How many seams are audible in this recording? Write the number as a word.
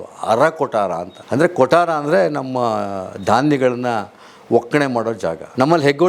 zero